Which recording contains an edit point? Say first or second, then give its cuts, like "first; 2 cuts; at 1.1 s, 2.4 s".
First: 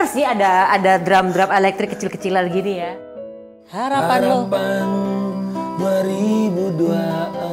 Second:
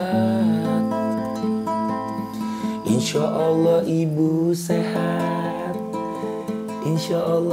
first; 1 cut; at 3.4 s